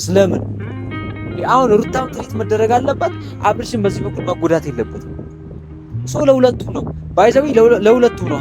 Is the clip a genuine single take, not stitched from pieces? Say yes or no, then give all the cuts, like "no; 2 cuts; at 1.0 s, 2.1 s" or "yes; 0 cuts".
yes; 0 cuts